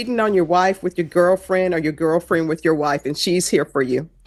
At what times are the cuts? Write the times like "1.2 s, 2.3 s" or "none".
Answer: none